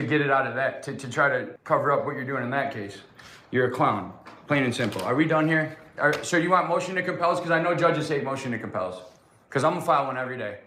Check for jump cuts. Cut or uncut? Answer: cut